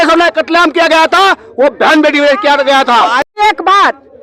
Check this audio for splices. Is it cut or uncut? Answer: cut